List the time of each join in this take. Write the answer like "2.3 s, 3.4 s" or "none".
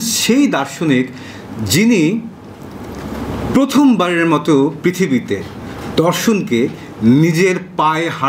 none